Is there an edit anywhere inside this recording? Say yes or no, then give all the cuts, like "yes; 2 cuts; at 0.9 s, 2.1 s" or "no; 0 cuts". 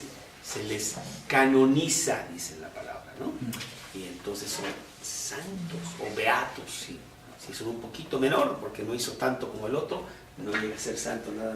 yes; 1 cut; at 2.2 s